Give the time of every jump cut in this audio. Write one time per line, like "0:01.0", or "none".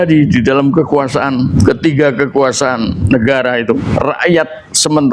0:01.5
0:03.8